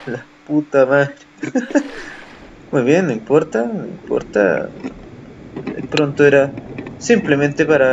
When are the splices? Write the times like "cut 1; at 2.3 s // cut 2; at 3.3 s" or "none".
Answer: cut 1; at 4.6 s

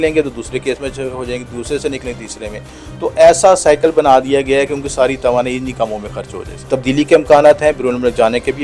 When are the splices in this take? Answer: cut 1; at 6.6 s

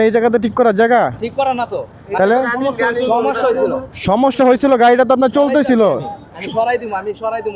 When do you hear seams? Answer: none

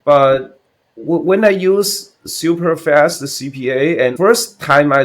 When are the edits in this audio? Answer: cut 1; at 4.1 s

